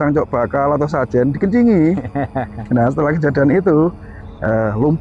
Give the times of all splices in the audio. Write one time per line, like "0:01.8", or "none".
none